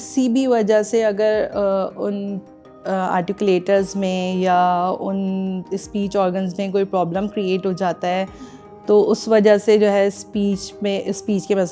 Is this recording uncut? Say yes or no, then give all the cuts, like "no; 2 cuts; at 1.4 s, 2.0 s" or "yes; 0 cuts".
yes; 0 cuts